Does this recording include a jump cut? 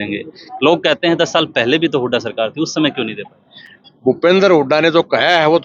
no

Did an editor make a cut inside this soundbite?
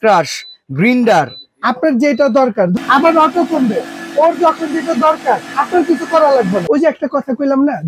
yes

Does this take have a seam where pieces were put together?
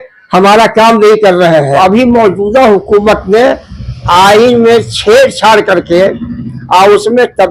yes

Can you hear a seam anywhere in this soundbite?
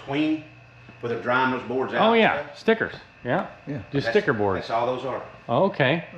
no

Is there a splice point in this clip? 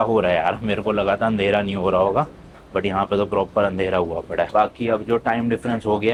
no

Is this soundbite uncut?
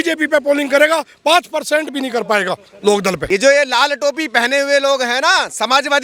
no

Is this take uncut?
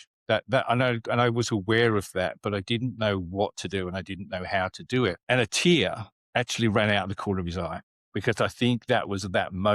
no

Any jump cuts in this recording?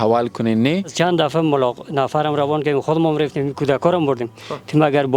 yes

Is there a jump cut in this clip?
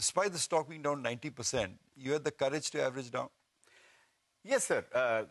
no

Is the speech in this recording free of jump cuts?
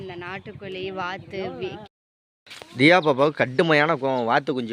no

